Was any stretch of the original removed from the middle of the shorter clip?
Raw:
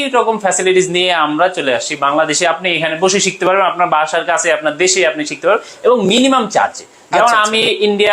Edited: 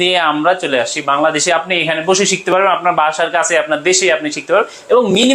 no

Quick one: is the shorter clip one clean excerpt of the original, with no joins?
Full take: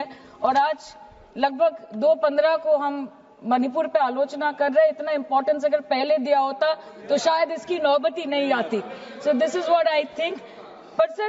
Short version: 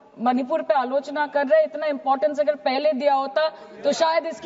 yes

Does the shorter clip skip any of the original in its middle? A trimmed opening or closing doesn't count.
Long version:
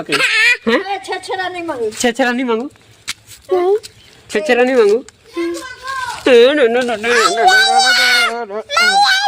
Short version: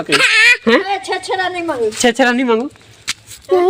no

